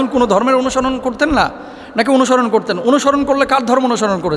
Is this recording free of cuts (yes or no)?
yes